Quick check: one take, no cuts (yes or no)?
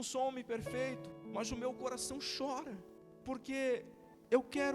no